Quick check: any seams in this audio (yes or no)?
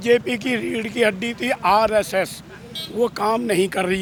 no